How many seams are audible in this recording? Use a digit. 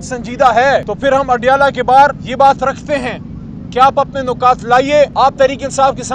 3